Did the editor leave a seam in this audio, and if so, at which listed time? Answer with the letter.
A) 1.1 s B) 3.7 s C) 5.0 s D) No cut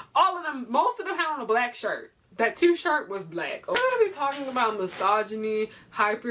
B